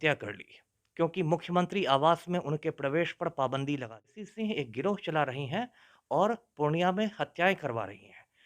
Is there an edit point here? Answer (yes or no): yes